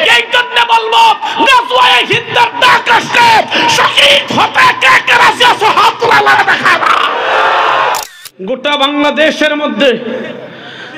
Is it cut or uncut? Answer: cut